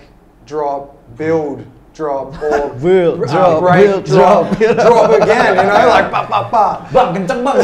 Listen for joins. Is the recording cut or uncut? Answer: uncut